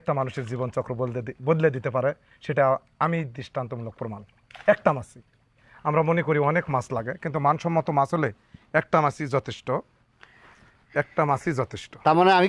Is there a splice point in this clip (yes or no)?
no